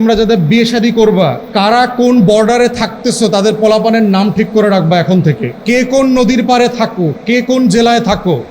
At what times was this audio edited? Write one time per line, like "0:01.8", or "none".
0:01.4
0:05.5